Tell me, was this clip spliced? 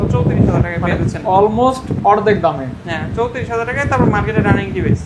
no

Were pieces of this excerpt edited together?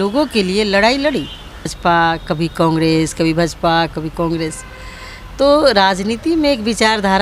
yes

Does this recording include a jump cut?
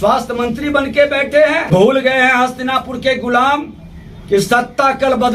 yes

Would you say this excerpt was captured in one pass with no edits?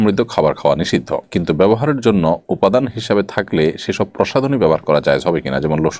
yes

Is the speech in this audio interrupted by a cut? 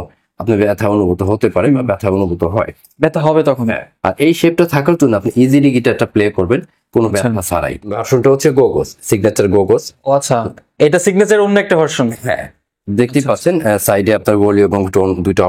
yes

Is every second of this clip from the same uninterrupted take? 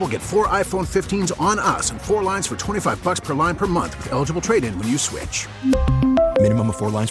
yes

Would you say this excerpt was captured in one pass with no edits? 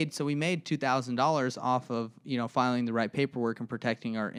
yes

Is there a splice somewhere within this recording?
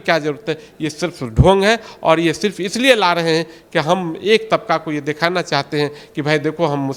no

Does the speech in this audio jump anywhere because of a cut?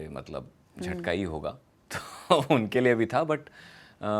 no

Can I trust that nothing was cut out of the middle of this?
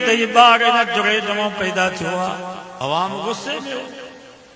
no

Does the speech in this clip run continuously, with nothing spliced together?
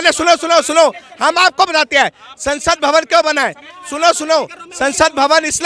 yes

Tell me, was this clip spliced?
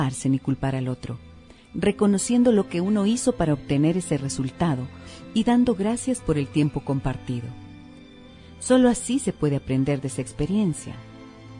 yes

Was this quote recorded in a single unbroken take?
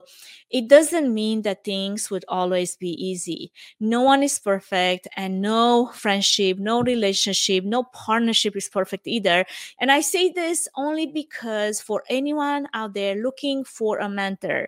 no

